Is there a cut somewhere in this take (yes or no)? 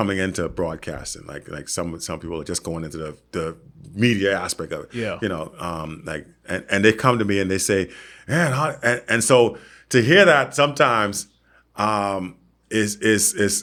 no